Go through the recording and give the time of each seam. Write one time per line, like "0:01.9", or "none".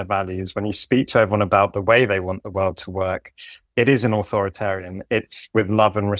0:03.5